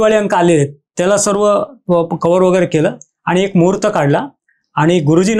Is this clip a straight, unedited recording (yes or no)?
yes